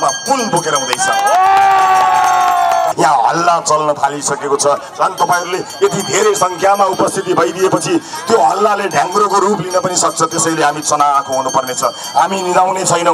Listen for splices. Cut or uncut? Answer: cut